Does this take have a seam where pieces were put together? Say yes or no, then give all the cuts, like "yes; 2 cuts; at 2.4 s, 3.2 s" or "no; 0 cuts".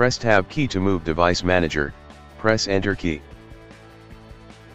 yes; 1 cut; at 3.2 s